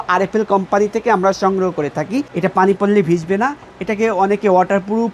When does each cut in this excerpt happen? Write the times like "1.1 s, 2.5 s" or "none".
2.3 s